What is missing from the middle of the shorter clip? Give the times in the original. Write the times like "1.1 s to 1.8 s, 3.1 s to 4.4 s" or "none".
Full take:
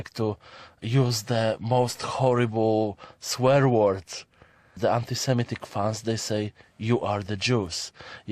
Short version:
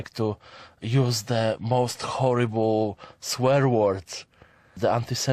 none